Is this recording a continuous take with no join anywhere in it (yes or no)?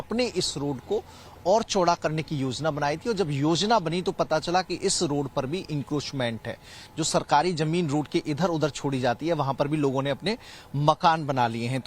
no